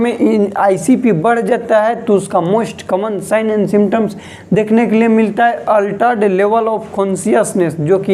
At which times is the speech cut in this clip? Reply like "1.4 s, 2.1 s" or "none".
none